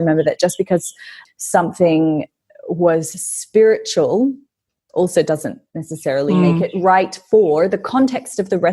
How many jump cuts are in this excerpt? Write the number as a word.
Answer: one